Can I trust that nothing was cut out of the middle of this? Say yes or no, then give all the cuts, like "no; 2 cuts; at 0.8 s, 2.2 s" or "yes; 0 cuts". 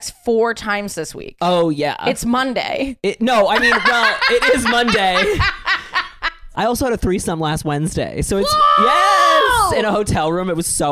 no; 1 cut; at 6.5 s